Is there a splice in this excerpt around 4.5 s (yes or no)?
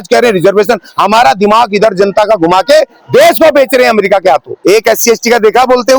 yes